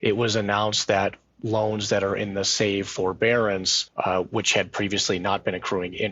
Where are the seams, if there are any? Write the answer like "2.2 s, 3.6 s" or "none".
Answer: 3.8 s